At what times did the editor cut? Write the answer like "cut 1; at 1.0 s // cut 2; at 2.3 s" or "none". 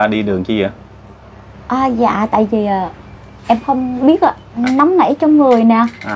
cut 1; at 4.6 s